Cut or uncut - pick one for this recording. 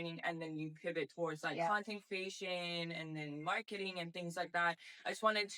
uncut